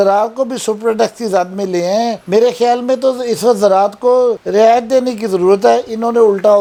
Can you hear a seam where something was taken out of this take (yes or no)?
no